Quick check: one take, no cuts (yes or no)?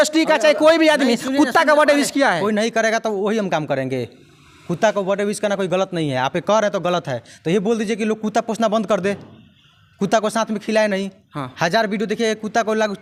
yes